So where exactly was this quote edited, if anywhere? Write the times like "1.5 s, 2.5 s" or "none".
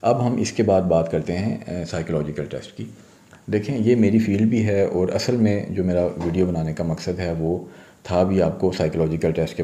none